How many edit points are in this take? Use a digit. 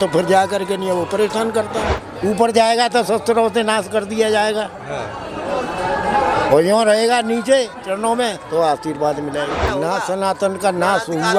2